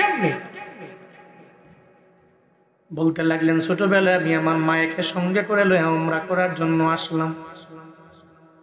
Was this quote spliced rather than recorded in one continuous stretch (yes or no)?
no